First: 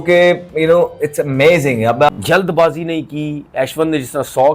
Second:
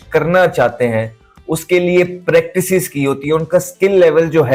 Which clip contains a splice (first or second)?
first